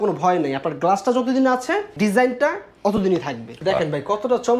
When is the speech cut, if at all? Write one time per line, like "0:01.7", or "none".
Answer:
0:01.9
0:03.5